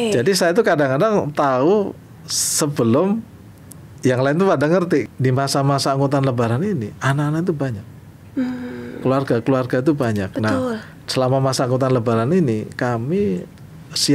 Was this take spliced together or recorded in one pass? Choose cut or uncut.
cut